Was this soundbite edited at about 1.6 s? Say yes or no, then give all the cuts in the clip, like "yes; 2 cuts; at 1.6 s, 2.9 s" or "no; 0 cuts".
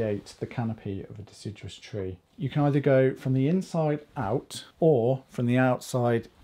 no; 1 cut; at 4.6 s